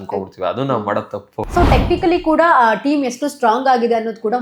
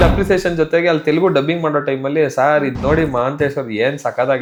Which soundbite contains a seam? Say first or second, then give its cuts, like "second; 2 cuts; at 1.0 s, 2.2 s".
first; 1 cut; at 1.4 s